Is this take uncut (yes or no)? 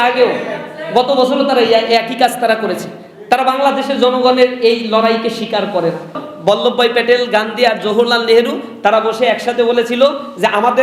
no